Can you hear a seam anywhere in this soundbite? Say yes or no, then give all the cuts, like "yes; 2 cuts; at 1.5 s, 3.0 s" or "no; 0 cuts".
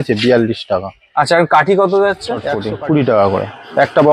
yes; 1 cut; at 2.5 s